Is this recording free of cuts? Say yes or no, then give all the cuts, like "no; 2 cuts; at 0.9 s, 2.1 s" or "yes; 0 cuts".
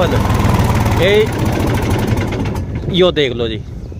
yes; 0 cuts